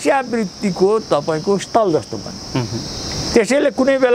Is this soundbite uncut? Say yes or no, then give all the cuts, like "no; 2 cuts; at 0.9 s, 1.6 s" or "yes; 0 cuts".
yes; 0 cuts